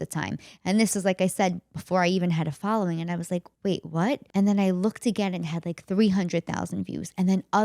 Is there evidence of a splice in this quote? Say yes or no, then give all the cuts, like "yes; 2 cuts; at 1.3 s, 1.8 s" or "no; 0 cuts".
yes; 2 cuts; at 3.5 s, 4.2 s